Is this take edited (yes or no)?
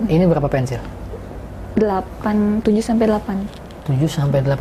no